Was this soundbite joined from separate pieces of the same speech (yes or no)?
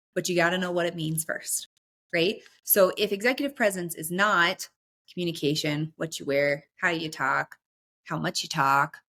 no